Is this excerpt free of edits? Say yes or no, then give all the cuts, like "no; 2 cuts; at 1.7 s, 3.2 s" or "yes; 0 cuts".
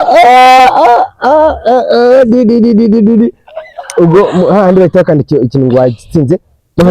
yes; 0 cuts